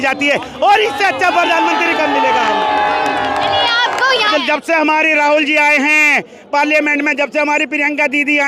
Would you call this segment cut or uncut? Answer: cut